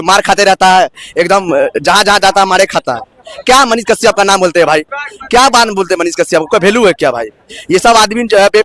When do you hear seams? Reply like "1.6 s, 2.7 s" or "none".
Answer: none